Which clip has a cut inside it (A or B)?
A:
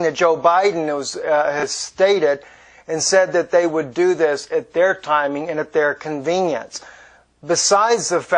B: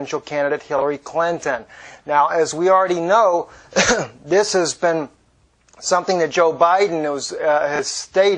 A